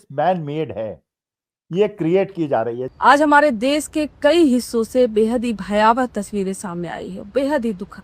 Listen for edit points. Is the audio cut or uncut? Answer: cut